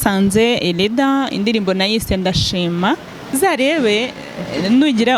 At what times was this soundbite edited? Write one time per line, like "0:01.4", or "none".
0:03.3